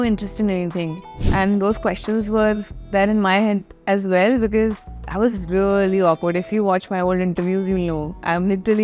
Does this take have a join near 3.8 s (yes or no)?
no